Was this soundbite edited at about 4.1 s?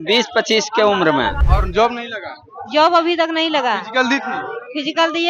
no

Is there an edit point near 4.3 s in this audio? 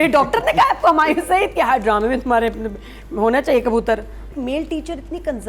yes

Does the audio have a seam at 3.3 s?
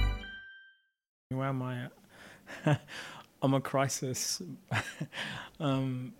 no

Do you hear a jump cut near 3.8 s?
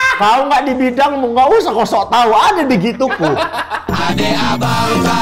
yes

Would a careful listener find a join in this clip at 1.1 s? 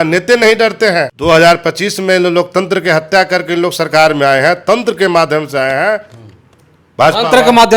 yes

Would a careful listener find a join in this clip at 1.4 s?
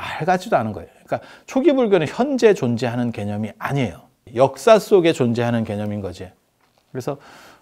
no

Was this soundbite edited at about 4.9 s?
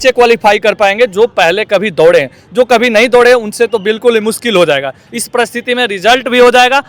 no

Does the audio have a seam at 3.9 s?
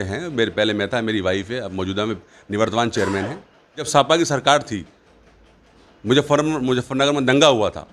yes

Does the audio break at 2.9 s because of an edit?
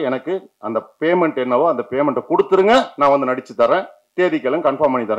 no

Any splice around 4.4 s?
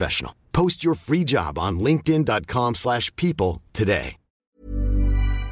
yes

